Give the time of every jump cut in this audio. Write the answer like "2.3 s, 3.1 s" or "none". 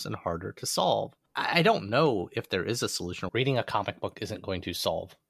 1.2 s, 3.3 s